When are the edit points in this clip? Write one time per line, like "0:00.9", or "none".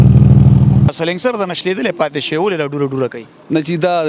0:00.9